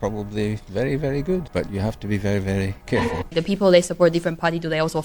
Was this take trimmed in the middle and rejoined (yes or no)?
yes